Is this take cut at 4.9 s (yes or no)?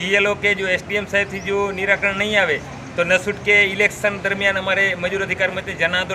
no